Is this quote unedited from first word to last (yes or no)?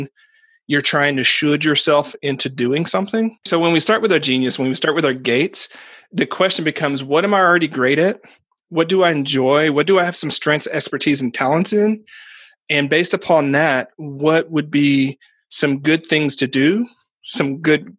no